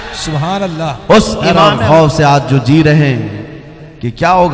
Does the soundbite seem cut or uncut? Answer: cut